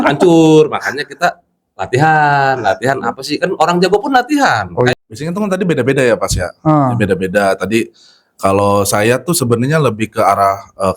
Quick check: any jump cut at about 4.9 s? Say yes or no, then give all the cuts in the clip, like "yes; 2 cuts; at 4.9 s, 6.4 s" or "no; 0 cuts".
yes; 1 cut; at 4.9 s